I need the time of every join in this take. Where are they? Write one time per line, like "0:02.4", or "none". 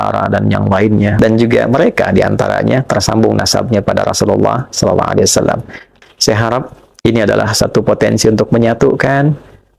0:01.1
0:05.9